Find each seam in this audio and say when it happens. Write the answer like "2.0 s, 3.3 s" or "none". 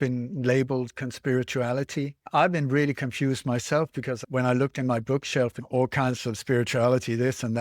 2.3 s, 4.2 s, 5.6 s